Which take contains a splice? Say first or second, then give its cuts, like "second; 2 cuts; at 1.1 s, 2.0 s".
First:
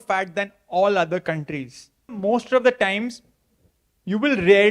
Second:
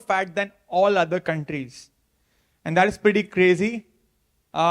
first; 1 cut; at 2.2 s